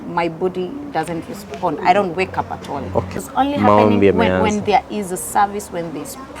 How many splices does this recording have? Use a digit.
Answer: 1